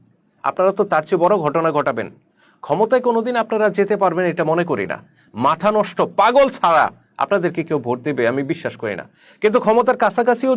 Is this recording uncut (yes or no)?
yes